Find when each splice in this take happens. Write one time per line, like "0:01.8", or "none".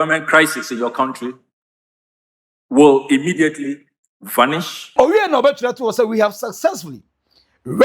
0:04.9